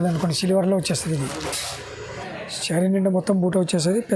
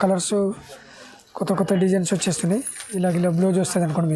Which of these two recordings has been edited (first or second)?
first